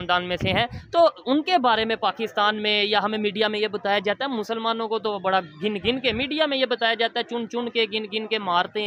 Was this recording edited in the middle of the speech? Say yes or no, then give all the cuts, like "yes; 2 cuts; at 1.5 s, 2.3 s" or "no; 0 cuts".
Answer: no; 0 cuts